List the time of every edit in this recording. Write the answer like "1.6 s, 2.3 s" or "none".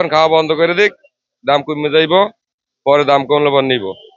none